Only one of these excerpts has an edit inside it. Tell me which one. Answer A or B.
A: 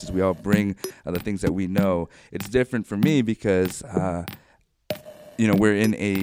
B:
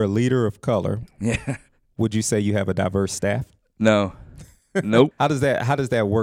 B